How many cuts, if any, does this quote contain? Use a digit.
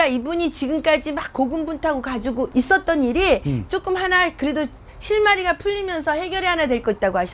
0